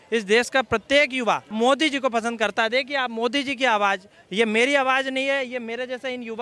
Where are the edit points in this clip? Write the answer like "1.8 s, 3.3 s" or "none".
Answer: 1.5 s